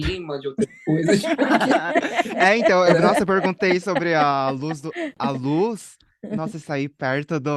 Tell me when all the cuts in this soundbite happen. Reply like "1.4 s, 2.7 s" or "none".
5.1 s